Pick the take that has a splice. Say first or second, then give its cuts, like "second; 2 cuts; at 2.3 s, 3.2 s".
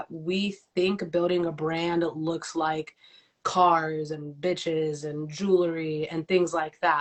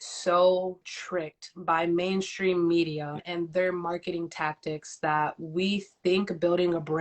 second; 1 cut; at 0.9 s